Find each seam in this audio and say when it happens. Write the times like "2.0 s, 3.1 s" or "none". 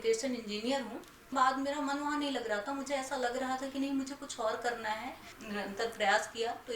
1.3 s, 5.3 s